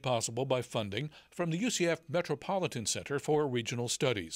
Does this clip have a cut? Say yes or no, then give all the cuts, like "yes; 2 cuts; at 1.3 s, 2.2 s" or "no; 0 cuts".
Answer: no; 0 cuts